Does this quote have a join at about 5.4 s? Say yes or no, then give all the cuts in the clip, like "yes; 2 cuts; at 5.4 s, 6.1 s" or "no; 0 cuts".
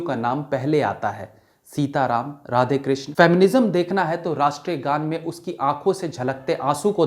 no; 1 cut; at 3.1 s